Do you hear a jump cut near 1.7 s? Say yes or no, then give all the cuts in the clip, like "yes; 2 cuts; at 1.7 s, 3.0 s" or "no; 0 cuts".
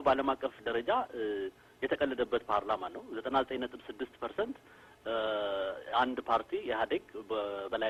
no; 0 cuts